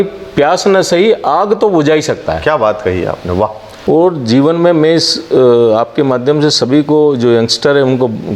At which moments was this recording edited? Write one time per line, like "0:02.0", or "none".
0:03.7